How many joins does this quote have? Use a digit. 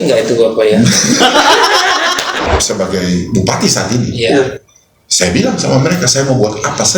1